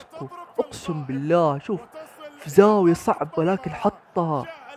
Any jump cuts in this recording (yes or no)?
no